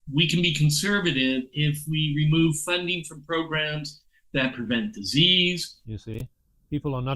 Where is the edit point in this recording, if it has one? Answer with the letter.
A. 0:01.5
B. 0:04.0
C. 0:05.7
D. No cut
C